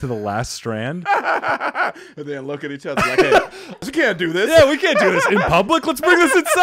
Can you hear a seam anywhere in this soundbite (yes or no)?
yes